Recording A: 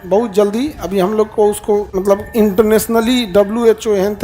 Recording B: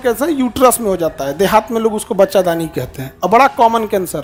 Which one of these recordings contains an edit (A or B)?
A